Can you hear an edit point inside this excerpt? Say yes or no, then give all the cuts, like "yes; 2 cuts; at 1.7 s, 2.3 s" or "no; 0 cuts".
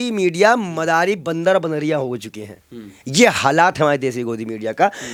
no; 0 cuts